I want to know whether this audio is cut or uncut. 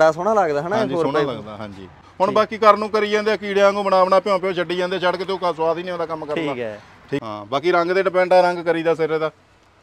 cut